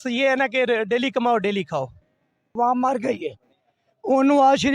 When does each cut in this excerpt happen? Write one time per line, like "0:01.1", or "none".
0:02.6